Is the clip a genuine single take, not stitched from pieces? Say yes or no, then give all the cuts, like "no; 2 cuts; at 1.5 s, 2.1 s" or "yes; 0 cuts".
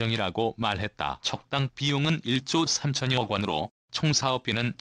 no; 2 cuts; at 1.2 s, 4.0 s